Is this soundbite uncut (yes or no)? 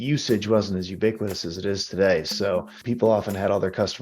no